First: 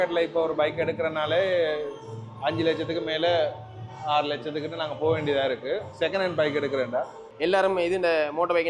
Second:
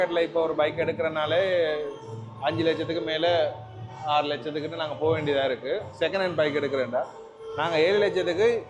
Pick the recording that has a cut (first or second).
first